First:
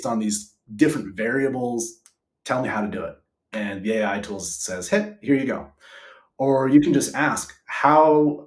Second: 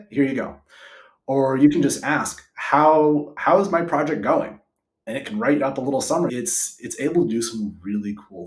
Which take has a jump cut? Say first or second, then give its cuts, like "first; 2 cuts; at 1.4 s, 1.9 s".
second; 1 cut; at 6.3 s